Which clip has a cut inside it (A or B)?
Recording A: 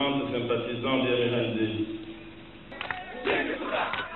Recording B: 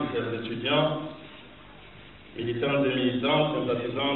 A